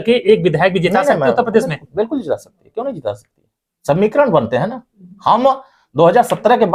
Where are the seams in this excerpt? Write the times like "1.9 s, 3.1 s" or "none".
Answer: none